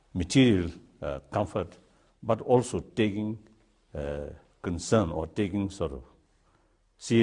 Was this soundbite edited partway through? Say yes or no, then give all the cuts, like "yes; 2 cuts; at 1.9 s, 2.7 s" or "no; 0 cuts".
yes; 1 cut; at 5.3 s